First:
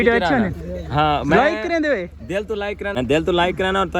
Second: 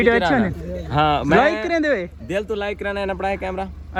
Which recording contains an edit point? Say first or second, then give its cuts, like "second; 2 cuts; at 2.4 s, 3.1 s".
first; 1 cut; at 2.9 s